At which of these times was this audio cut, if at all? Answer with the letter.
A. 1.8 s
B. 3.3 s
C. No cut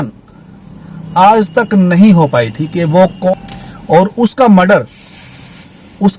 B